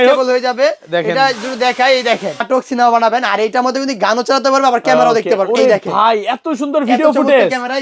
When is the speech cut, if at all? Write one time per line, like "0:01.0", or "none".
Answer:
0:02.3